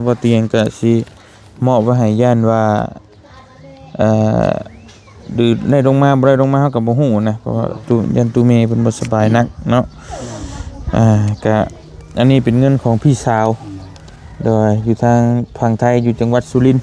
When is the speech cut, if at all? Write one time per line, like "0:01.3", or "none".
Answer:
none